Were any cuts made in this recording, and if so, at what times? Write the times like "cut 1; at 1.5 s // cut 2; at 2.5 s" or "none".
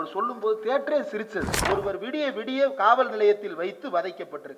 cut 1; at 1.5 s

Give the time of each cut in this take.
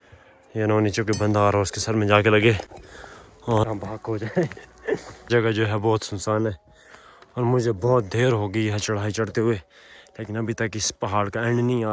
cut 1; at 3.6 s // cut 2; at 5.1 s

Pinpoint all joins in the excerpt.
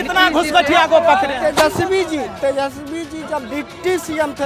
cut 1; at 1.4 s

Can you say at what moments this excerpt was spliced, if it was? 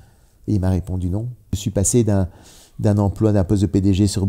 cut 1; at 1.6 s

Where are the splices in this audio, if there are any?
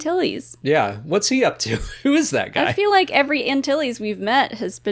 none

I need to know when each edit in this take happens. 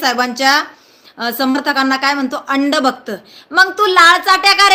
none

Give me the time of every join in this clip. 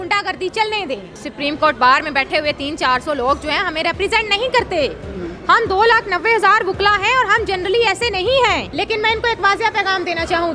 cut 1; at 1.2 s // cut 2; at 8.7 s

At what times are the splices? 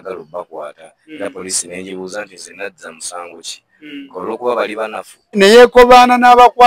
cut 1; at 5.4 s

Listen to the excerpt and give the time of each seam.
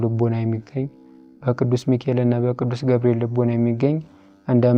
none

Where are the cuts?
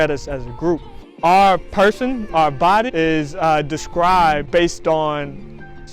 cut 1; at 1.0 s // cut 2; at 2.9 s // cut 3; at 4.4 s

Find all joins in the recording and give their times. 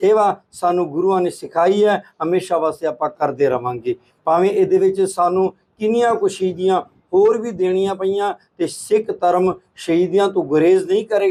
none

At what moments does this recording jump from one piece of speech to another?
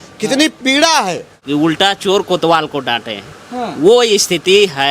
cut 1; at 1.3 s

